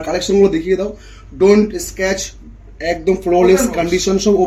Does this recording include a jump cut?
no; 0 cuts

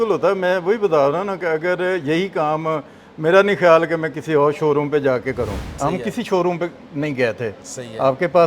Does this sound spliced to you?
yes; 1 cut; at 5.6 s

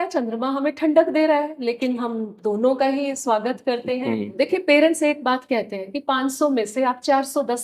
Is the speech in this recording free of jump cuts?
no; 1 cut; at 4.3 s

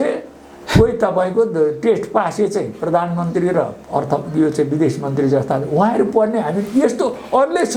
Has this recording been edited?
no; 0 cuts

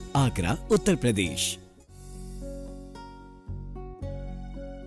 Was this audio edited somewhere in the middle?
yes; 1 cut; at 1.4 s

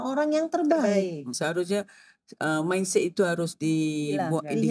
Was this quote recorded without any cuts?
no; 1 cut; at 1.4 s

